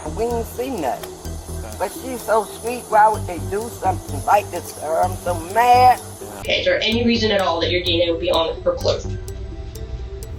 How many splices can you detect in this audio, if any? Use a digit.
1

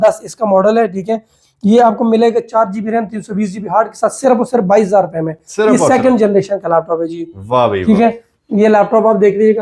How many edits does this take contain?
0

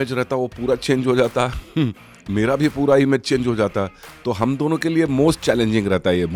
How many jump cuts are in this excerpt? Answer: 0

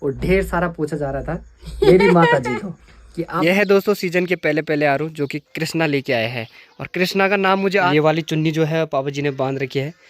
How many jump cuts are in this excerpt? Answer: 2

